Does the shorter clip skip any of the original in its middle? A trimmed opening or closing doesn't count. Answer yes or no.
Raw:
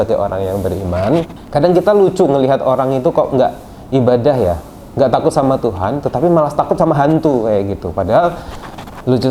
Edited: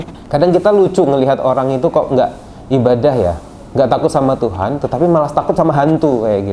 no